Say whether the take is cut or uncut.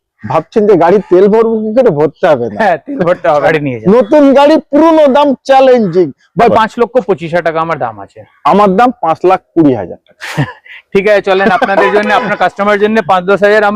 cut